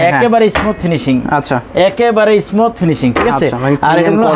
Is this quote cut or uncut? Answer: uncut